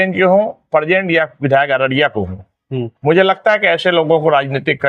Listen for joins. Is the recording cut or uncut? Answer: uncut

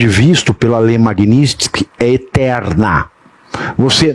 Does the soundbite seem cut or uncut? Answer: uncut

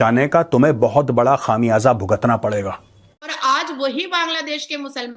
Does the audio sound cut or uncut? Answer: cut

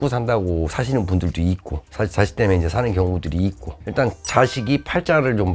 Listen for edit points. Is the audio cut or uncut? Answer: cut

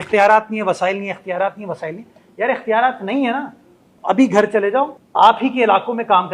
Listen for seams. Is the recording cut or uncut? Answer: cut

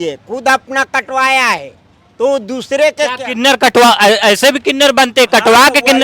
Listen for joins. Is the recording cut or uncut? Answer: uncut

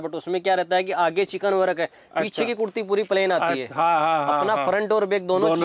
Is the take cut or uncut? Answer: uncut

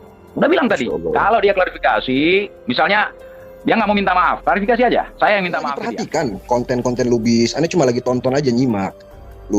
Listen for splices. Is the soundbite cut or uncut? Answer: cut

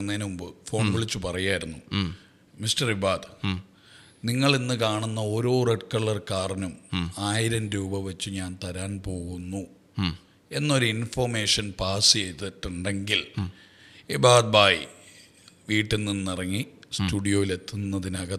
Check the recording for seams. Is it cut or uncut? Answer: uncut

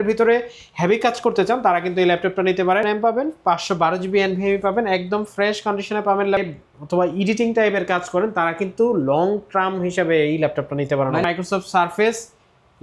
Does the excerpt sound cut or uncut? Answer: cut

